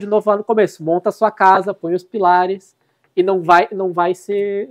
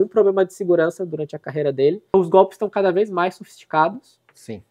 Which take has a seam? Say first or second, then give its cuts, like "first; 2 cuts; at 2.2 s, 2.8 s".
second; 1 cut; at 2.1 s